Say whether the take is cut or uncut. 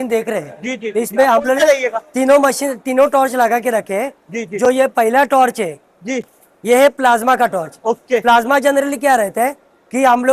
uncut